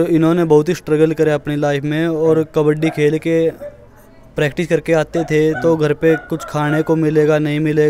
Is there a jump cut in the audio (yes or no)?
no